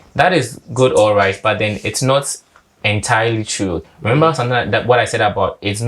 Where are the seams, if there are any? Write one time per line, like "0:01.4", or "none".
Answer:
0:03.9